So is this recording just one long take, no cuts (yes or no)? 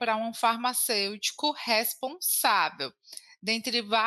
yes